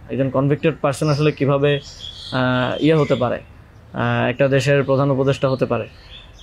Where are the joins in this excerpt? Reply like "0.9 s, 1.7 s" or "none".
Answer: none